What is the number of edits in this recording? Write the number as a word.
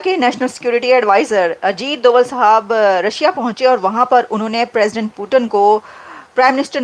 zero